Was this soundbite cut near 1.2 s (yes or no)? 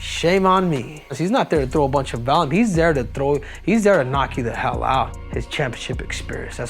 yes